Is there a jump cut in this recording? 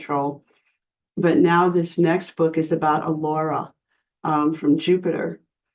no; 0 cuts

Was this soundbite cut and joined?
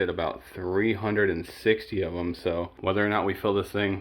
yes; 1 cut; at 2.7 s

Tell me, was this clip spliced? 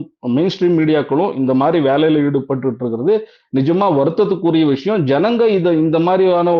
no; 0 cuts

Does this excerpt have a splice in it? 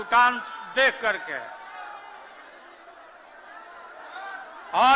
no; 0 cuts

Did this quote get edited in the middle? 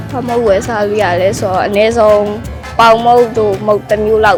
no; 0 cuts

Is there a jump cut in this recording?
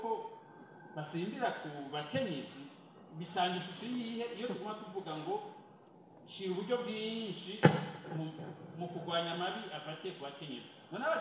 no; 0 cuts

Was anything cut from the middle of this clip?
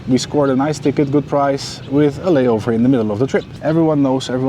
yes; 1 cut; at 3.5 s

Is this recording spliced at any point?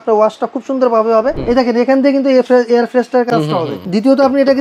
yes; 2 cuts; at 1.4 s, 3.3 s

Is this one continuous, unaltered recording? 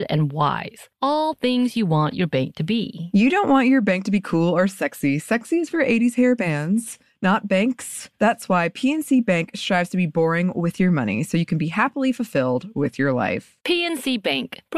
yes; 0 cuts

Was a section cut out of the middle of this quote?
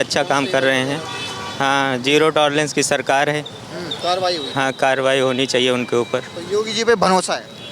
yes; 1 cut; at 4.0 s

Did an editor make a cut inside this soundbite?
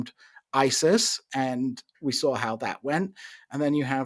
no; 0 cuts

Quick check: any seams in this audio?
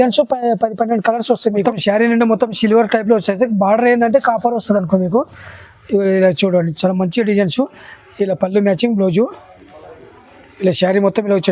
yes; 1 cut; at 1.6 s

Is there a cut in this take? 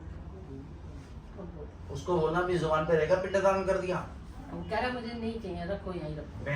no; 0 cuts

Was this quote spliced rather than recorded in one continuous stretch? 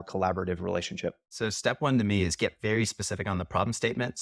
yes; 1 cut; at 1.3 s

